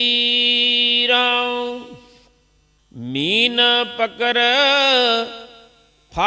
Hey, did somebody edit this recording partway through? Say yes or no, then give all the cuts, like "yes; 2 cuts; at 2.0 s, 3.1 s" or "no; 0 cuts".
yes; 1 cut; at 2.5 s